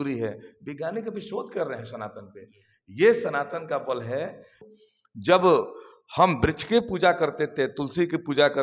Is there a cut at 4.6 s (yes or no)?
yes